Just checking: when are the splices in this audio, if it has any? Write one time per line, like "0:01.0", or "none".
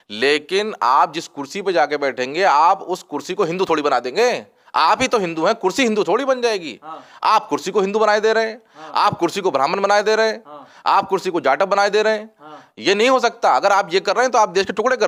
none